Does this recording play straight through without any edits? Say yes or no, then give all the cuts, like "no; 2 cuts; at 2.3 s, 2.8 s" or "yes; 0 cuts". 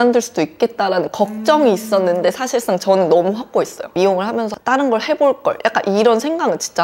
no; 2 cuts; at 3.8 s, 4.5 s